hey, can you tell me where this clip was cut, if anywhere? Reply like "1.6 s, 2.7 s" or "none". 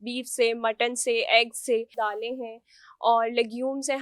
1.9 s